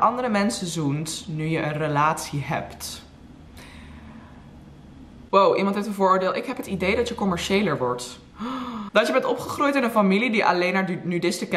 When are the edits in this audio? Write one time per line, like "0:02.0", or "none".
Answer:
0:05.2
0:08.8